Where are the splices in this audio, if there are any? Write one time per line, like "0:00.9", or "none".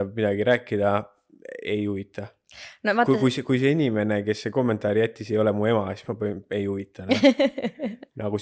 none